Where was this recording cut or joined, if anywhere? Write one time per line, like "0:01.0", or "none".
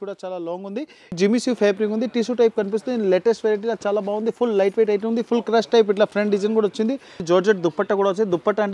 0:01.1
0:07.2